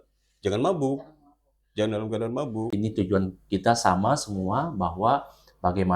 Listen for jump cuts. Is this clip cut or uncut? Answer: cut